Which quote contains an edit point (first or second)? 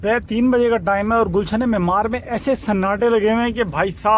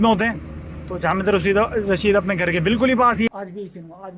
second